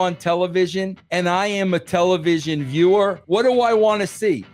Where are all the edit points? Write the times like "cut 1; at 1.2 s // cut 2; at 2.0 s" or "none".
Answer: cut 1; at 1.0 s // cut 2; at 3.2 s